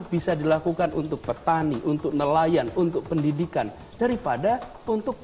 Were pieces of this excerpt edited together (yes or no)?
no